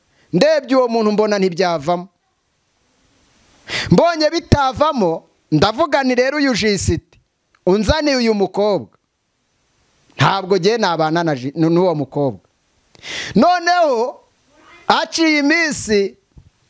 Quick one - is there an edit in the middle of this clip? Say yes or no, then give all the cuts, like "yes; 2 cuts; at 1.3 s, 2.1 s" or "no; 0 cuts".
no; 0 cuts